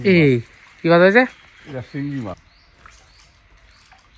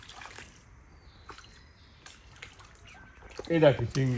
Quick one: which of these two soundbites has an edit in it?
first; 1 cut; at 2.4 s

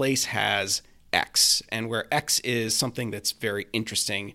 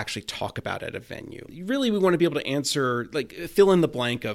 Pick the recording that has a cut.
second; 1 cut; at 1.5 s

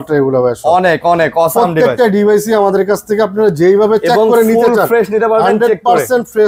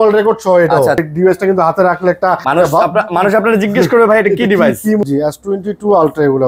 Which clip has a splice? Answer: second; 3 cuts; at 1.0 s, 2.4 s, 5.0 s

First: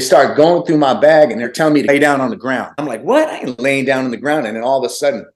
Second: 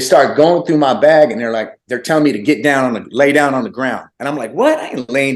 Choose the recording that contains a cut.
first; 2 cuts; at 1.7 s, 2.7 s

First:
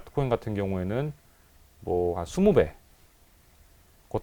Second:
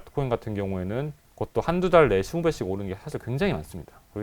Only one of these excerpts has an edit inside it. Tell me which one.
second; 1 cut; at 1.2 s

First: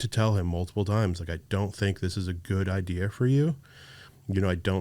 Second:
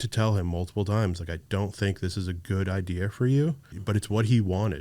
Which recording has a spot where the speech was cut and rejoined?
second; 1 cut; at 3.8 s

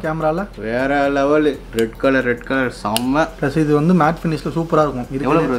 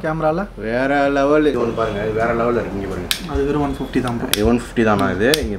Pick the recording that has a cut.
second; 1 cut; at 1.5 s

